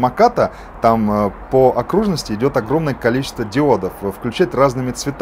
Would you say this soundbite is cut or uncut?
uncut